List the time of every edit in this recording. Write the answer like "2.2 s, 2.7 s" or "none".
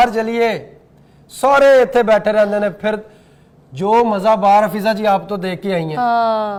none